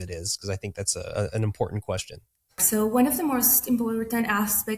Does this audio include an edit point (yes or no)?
yes